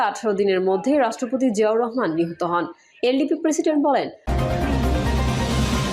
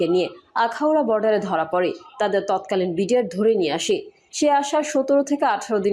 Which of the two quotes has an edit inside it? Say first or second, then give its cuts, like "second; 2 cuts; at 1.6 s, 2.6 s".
first; 1 cut; at 4.2 s